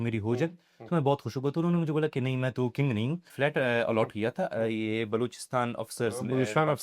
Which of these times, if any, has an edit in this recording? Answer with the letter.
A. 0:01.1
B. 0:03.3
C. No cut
B